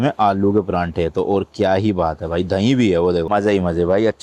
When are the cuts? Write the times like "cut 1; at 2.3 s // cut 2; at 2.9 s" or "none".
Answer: none